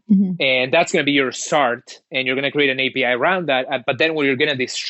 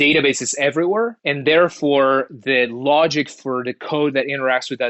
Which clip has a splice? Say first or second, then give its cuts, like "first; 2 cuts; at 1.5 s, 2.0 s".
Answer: second; 1 cut; at 1.2 s